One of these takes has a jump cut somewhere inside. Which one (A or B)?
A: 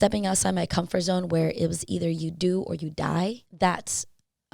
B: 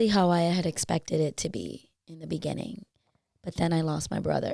A